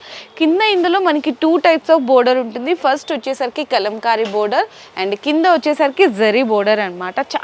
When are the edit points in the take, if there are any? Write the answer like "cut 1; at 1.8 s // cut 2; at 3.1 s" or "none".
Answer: none